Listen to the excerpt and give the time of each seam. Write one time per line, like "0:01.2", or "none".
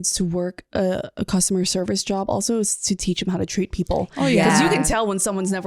none